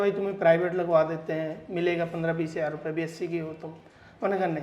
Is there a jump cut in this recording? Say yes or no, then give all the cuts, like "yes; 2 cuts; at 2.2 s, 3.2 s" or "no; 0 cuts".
no; 0 cuts